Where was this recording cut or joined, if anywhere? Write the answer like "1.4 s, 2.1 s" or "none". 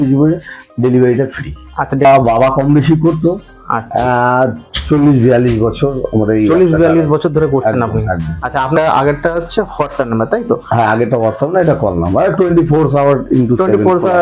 2.1 s, 8.7 s